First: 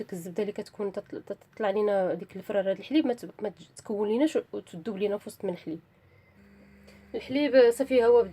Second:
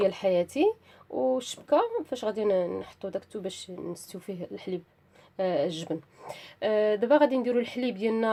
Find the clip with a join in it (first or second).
first